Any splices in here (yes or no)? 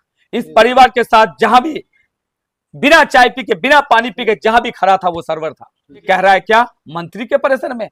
no